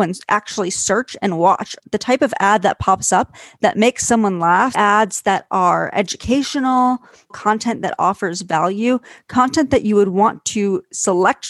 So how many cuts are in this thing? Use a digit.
3